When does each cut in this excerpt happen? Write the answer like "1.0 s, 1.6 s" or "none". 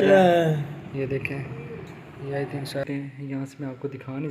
2.8 s